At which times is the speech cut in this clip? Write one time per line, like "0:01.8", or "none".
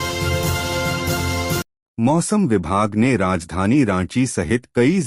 none